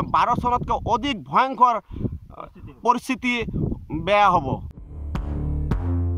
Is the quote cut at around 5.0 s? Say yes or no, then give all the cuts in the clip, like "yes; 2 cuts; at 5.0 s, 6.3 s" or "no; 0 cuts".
yes; 1 cut; at 5.0 s